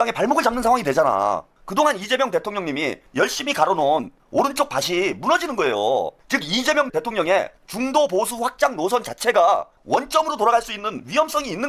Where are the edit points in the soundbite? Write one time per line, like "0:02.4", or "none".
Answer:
0:01.6
0:03.0
0:06.2

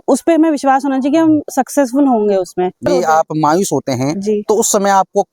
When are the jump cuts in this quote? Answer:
0:02.9

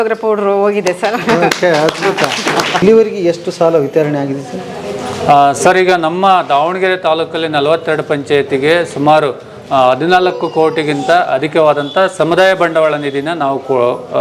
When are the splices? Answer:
0:02.8

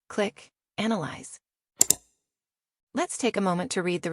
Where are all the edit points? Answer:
0:02.2

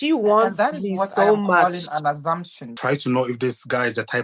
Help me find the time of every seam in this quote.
0:02.7

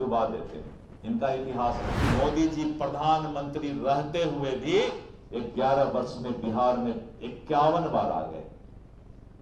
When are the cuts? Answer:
0:02.0

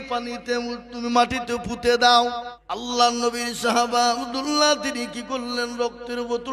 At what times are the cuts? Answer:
0:02.5

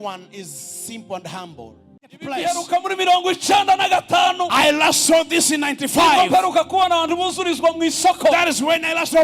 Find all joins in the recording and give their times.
0:02.0

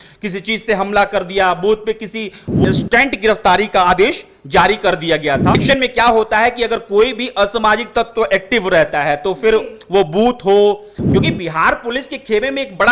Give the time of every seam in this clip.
0:02.6
0:05.6
0:10.9

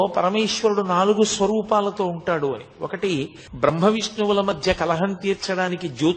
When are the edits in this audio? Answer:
0:03.4

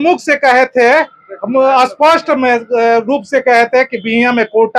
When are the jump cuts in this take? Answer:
none

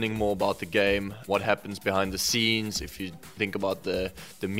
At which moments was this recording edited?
0:01.2

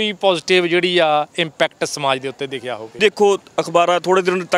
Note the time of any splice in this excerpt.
0:03.0

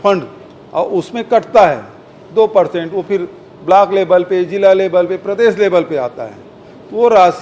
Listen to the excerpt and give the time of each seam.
none

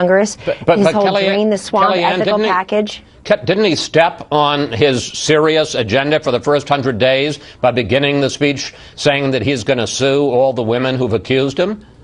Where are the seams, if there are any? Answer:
0:02.2

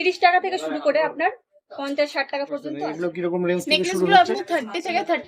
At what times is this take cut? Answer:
0:02.9

